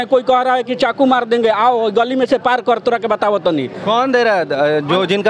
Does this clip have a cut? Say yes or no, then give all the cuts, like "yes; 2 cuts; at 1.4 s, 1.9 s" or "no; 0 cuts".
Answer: no; 0 cuts